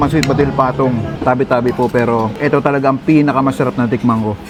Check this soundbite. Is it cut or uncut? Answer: uncut